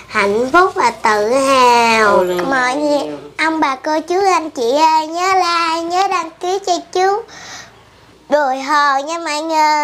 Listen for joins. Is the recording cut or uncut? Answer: cut